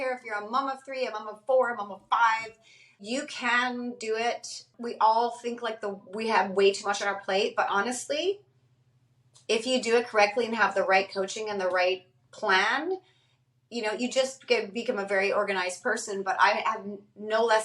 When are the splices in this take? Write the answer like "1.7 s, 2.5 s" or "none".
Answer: 3.0 s, 4.7 s